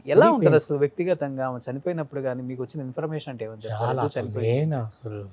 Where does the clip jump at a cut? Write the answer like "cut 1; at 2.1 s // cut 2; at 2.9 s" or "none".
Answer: none